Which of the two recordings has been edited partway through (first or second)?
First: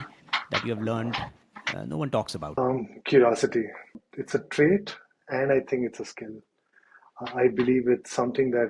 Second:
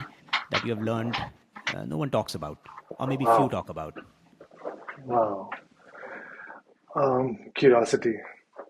first